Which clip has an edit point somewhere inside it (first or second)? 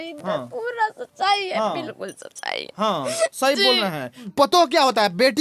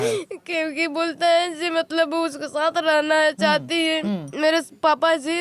first